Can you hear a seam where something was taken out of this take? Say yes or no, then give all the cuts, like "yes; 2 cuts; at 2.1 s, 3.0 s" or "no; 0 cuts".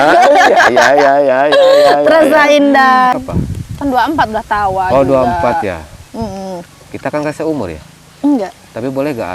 yes; 1 cut; at 3.1 s